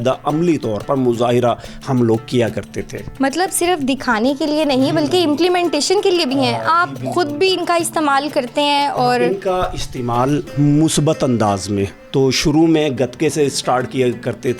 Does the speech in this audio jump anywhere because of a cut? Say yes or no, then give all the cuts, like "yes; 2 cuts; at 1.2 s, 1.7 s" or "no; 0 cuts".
no; 0 cuts